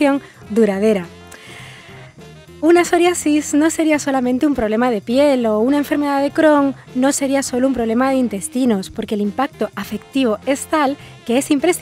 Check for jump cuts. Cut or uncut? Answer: cut